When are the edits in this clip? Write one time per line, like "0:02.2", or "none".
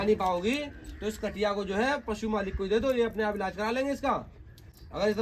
none